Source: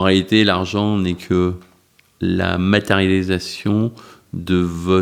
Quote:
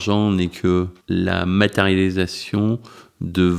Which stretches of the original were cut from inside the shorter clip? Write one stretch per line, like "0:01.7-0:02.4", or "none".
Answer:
0:01.6-0:02.1